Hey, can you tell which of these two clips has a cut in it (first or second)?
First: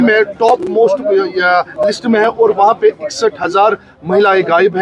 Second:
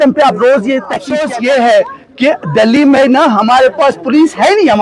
second